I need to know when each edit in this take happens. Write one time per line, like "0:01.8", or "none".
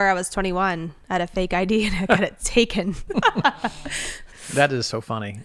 0:03.1
0:04.3